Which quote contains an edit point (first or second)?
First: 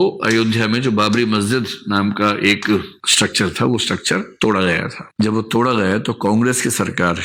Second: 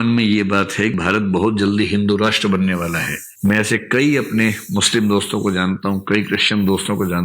second